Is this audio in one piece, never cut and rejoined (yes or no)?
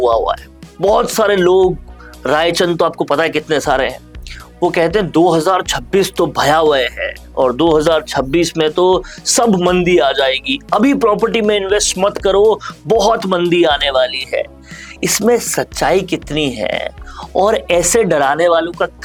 yes